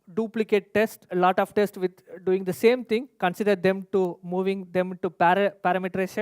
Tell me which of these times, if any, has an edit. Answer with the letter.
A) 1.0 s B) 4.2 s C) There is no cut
A